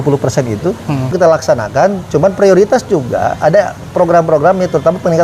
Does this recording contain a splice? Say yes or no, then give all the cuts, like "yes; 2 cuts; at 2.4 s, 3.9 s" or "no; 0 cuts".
yes; 1 cut; at 1.1 s